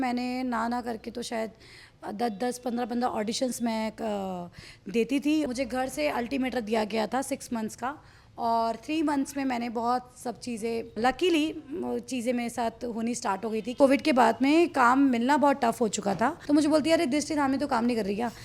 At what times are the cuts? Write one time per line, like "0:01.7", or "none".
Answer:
0:05.5
0:11.0
0:13.7
0:16.4